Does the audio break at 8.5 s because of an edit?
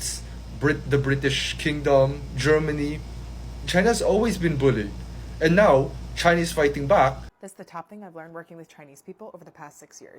no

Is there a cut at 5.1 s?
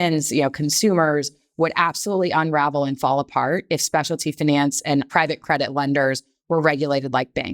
yes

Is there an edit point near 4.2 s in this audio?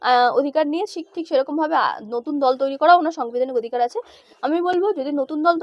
yes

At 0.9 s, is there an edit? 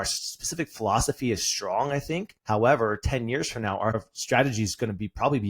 no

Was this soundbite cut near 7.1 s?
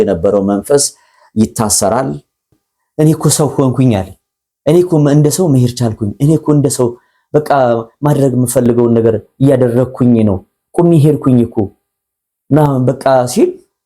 no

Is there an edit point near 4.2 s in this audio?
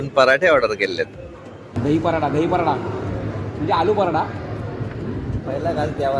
no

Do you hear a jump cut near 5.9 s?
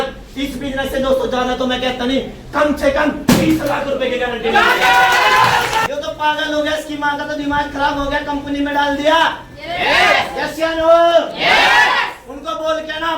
yes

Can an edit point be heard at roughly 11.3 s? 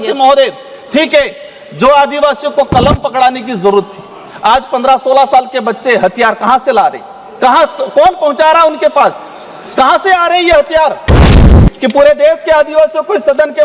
yes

